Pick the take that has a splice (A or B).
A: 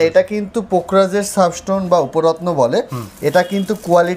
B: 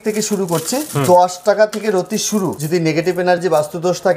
B